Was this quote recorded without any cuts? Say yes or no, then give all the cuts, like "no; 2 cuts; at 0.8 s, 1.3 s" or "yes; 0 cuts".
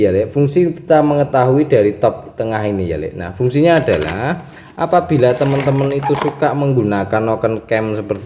yes; 0 cuts